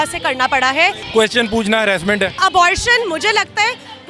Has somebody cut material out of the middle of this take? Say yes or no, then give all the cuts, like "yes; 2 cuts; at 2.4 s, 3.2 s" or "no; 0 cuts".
yes; 2 cuts; at 1.0 s, 2.4 s